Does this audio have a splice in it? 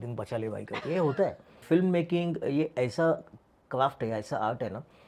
no; 0 cuts

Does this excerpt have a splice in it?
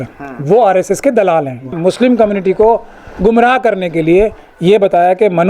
yes; 1 cut; at 1.7 s

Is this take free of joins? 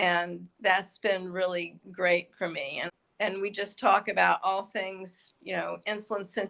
no; 1 cut; at 2.8 s

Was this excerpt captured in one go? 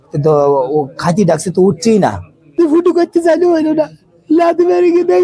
no; 1 cut; at 2.5 s

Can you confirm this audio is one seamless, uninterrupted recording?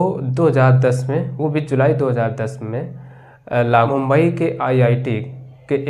no; 1 cut; at 3.9 s

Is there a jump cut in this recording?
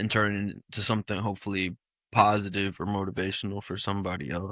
no; 0 cuts

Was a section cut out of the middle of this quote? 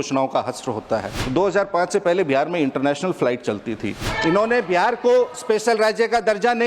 yes; 2 cuts; at 1.2 s, 4.1 s

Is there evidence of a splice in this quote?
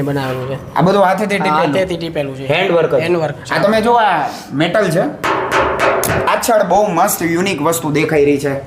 yes; 1 cut; at 6.3 s

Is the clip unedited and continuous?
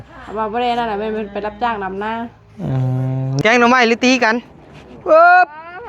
no; 1 cut; at 3.3 s

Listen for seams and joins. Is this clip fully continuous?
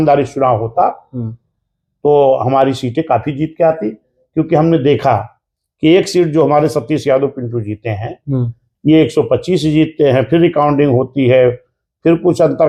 yes; 0 cuts

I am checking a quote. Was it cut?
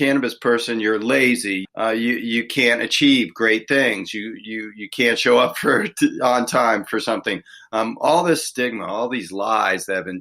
yes; 1 cut; at 1.6 s

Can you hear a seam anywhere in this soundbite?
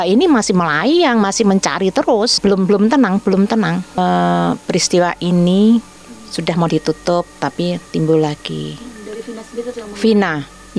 yes; 2 cuts; at 2.4 s, 3.9 s

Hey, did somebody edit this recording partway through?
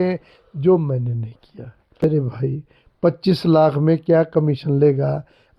yes; 1 cut; at 2.0 s

